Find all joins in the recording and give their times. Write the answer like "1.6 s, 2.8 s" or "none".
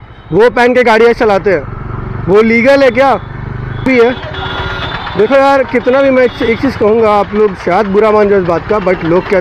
3.8 s